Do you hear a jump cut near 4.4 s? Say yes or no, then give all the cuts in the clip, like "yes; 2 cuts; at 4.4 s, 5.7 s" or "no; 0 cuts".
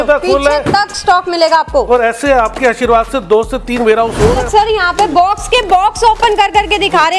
yes; 1 cut; at 4.4 s